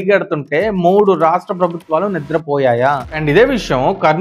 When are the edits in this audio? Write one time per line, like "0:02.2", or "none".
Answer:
0:03.1